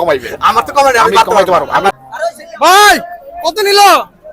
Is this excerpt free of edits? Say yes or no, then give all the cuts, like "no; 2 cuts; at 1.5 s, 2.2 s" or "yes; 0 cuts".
no; 1 cut; at 1.9 s